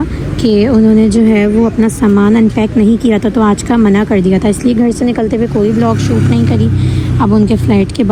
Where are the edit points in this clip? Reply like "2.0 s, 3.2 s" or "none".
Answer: none